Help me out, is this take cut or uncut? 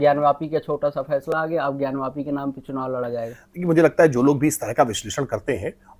uncut